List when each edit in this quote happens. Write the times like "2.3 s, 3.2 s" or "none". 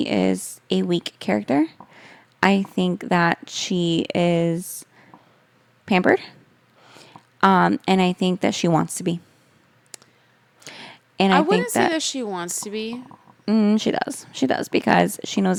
none